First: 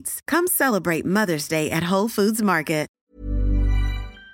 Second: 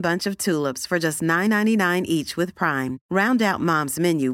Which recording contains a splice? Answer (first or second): first